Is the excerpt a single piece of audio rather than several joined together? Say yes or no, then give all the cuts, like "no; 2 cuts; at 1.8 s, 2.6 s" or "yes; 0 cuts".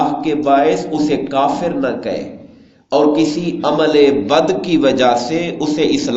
yes; 0 cuts